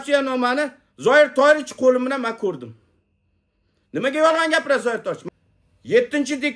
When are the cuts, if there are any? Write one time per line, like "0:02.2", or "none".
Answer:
0:05.2